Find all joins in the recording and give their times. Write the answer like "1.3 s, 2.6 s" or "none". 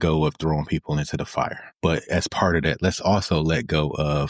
1.6 s